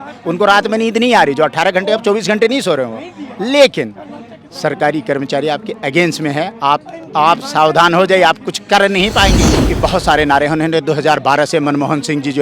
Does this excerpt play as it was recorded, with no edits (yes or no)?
no